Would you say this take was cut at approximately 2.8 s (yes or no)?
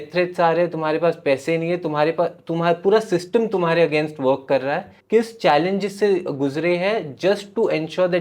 no